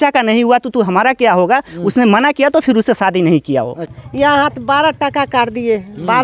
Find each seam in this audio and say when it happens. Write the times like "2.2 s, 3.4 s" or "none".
3.8 s